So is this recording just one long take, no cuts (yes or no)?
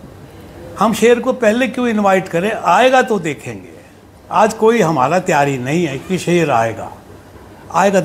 yes